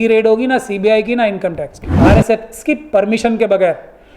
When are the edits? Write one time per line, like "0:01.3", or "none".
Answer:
0:01.9